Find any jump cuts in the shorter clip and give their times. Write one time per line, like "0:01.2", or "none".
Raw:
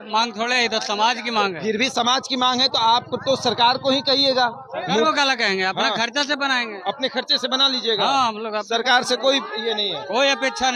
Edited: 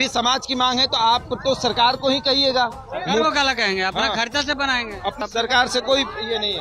0:05.2